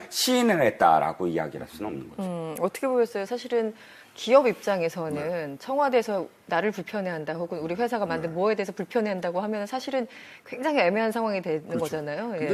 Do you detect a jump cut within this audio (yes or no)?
no